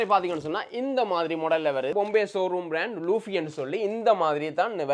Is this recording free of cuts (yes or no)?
no